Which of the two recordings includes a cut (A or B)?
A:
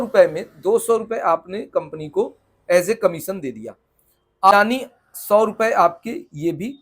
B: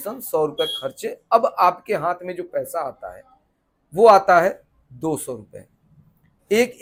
A